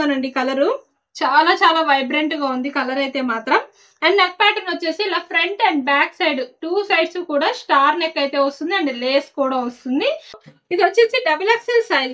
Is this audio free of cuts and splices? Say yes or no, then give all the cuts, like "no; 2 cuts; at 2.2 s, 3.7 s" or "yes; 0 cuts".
no; 1 cut; at 10.5 s